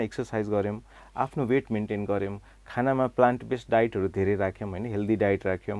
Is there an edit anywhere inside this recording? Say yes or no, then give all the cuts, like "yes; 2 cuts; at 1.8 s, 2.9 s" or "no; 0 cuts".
no; 0 cuts